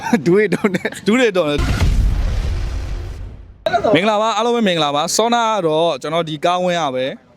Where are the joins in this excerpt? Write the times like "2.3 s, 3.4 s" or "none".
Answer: 1.6 s